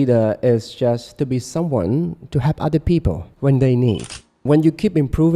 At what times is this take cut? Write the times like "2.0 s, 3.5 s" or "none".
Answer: 3.3 s, 4.4 s